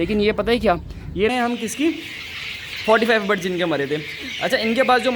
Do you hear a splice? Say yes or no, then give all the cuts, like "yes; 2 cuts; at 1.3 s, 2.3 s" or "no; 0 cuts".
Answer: yes; 1 cut; at 1.3 s